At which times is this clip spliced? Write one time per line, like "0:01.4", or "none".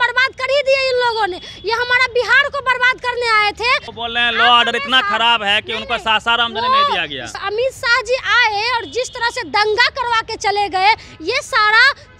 0:03.9
0:07.4